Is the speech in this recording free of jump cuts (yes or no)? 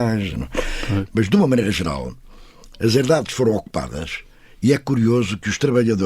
no